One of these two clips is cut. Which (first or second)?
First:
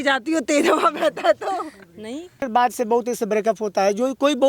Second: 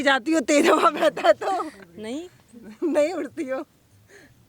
first